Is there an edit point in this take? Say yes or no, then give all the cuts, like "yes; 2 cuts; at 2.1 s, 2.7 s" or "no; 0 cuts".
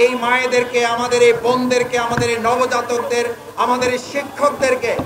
no; 0 cuts